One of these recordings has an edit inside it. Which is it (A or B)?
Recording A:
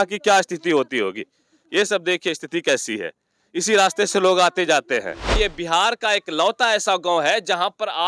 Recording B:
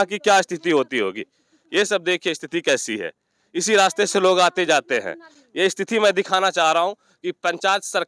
A